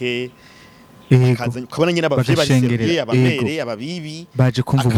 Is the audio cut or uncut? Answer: uncut